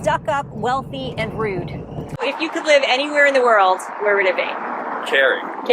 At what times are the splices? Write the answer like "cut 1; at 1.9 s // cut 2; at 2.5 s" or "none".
cut 1; at 2.2 s